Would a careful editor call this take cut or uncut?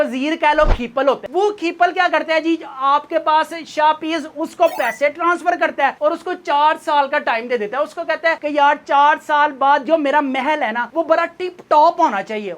cut